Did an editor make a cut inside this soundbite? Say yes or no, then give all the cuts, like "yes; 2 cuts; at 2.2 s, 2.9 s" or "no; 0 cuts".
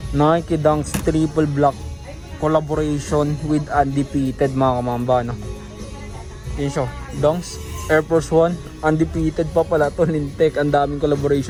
no; 0 cuts